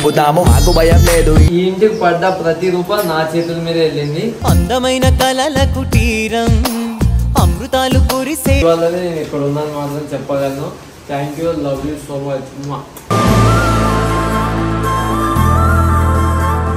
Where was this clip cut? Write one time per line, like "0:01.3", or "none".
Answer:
0:01.5
0:08.6